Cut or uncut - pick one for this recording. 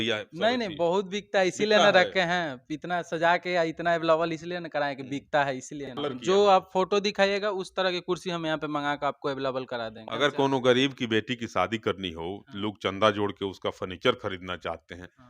cut